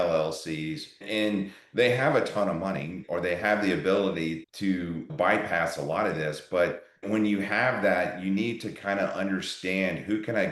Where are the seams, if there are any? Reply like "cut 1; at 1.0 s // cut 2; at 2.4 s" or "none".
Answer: cut 1; at 3.0 s